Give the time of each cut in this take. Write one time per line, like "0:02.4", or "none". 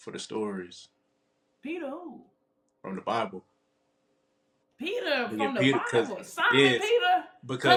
none